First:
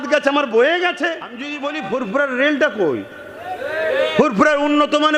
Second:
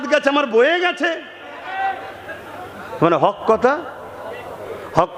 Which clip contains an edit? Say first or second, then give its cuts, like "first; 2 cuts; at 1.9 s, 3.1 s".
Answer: first; 1 cut; at 1.6 s